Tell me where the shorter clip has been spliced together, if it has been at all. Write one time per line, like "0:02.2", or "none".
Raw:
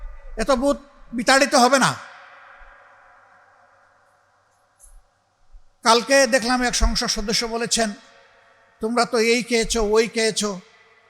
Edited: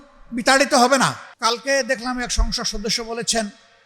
0:01.3

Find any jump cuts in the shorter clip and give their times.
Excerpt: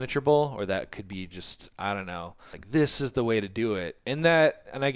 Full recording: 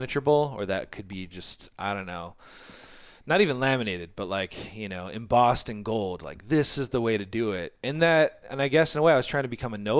0:02.5

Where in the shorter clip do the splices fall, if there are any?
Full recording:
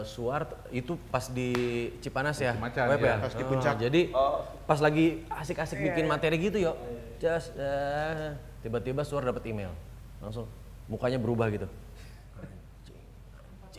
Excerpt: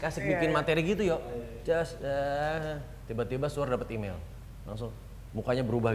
none

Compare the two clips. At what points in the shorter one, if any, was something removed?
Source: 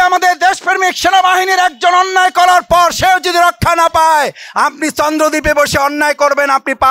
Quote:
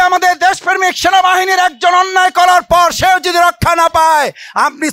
none

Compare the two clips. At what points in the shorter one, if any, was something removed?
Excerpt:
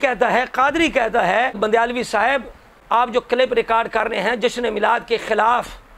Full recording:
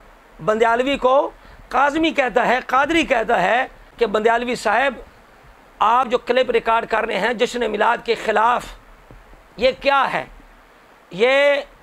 0:01.6
0:03.1

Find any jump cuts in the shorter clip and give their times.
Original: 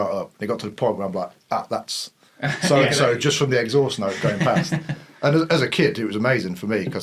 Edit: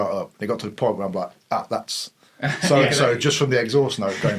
none

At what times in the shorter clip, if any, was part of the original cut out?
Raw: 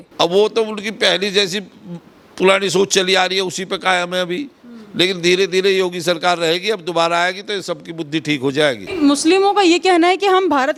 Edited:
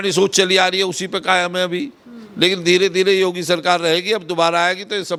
none

